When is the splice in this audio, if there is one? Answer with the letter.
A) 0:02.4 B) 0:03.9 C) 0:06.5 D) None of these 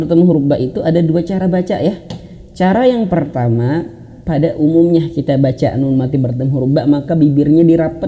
D